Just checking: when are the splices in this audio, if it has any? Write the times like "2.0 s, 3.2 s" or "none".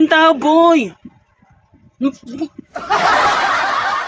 2.7 s